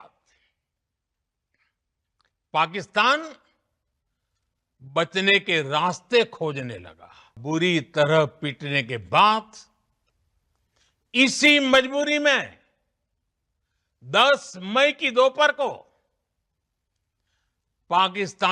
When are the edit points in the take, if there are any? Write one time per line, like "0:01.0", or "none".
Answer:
0:07.3

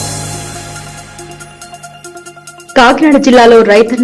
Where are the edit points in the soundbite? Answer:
0:02.6

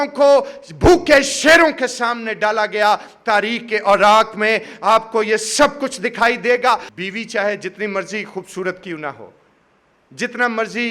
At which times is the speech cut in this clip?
0:06.9

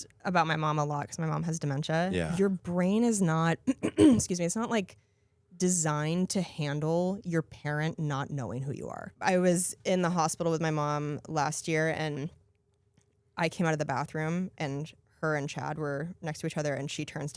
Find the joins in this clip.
0:02.3
0:09.1

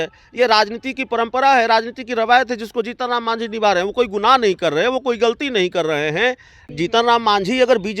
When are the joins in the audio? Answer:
0:06.7

